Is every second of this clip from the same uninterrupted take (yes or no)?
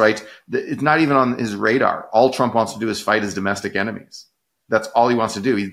yes